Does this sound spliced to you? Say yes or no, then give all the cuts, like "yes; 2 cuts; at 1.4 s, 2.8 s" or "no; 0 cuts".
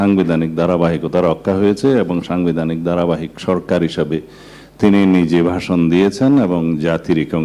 no; 0 cuts